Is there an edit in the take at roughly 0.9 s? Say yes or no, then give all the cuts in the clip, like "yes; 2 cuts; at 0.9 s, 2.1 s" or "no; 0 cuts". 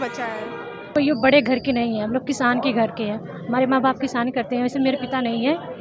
yes; 1 cut; at 0.9 s